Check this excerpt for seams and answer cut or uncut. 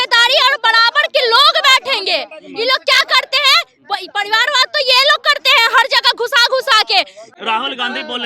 uncut